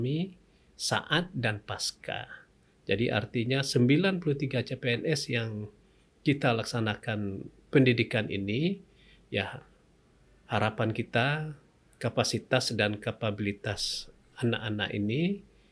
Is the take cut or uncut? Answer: uncut